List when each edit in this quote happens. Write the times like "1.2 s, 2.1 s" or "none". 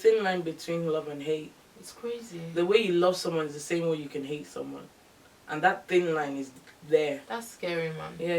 none

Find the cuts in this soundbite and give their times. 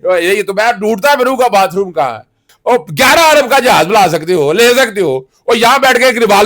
2.5 s

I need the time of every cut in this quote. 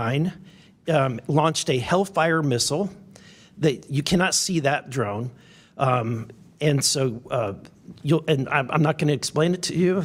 none

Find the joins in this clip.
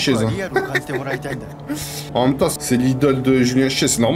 none

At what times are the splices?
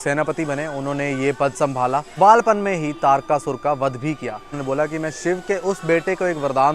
2.1 s, 4.5 s

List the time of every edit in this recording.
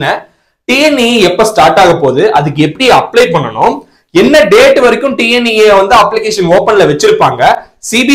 none

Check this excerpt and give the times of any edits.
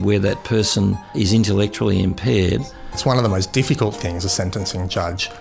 1.1 s, 2.8 s

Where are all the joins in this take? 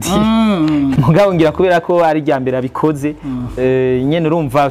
1.0 s

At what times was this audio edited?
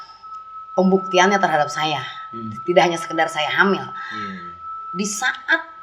none

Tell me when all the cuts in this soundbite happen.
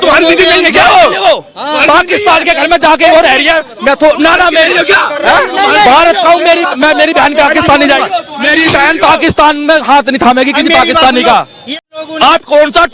11.7 s

